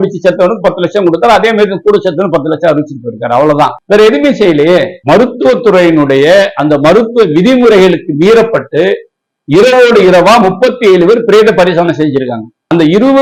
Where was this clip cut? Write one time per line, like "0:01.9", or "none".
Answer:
none